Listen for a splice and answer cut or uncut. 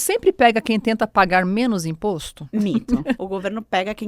cut